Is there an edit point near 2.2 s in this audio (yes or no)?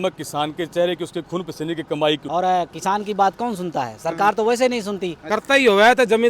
yes